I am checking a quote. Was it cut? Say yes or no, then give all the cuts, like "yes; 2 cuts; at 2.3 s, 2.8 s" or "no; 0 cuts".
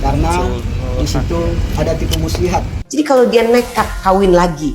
yes; 1 cut; at 2.8 s